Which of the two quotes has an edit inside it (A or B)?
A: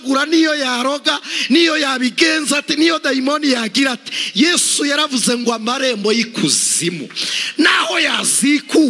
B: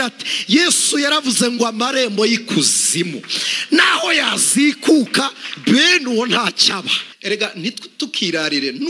B